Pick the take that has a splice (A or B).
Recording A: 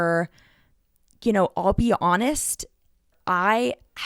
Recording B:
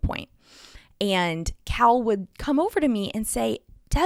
A